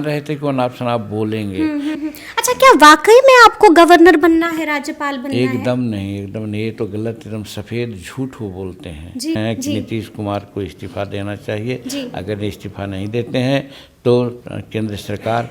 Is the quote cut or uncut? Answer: cut